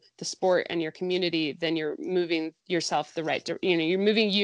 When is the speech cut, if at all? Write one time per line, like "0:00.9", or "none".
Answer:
0:02.6